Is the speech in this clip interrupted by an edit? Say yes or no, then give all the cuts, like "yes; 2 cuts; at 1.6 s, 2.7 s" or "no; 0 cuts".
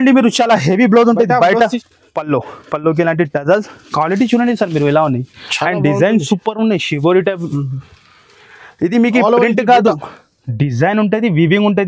yes; 1 cut; at 1.8 s